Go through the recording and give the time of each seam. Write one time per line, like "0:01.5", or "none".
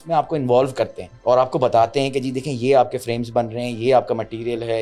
0:01.1